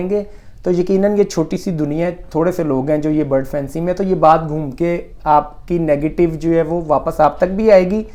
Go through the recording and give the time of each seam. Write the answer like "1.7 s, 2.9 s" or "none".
none